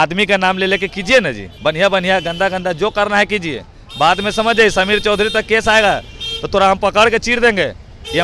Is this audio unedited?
yes; 0 cuts

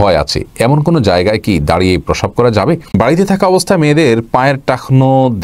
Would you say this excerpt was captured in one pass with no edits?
no; 1 cut; at 2.9 s

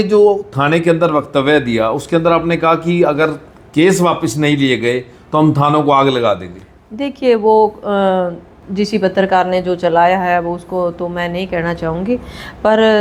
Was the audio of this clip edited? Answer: no; 0 cuts

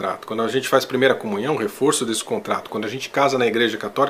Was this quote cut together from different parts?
no; 0 cuts

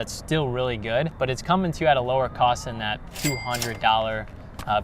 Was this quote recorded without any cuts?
no; 1 cut; at 1.1 s

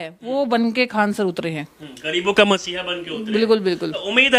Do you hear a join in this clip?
no; 0 cuts

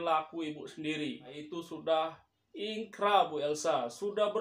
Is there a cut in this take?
yes; 1 cut; at 1.4 s

